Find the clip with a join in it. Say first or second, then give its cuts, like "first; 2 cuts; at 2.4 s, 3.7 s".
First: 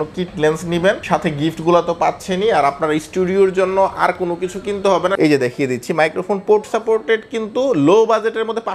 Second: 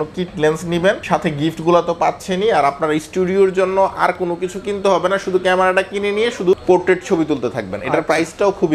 first; 1 cut; at 5.1 s